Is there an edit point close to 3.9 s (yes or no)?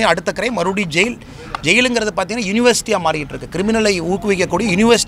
no